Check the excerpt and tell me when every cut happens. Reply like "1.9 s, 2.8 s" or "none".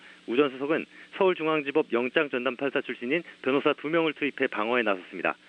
1.6 s